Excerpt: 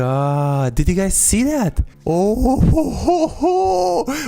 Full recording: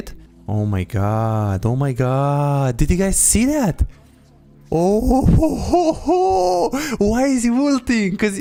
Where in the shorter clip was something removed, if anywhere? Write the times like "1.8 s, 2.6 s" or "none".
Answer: 1.9 s